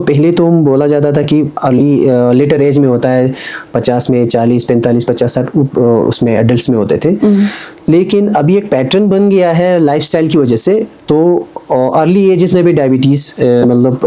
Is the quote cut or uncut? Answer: uncut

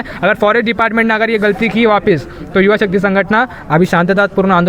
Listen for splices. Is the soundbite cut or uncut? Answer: uncut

